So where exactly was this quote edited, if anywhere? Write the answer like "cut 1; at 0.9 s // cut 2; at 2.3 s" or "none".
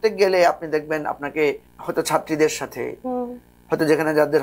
cut 1; at 1.7 s